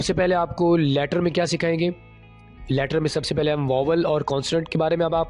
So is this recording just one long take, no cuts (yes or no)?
yes